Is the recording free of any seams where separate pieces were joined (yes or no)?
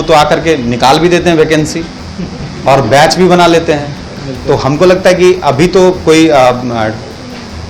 yes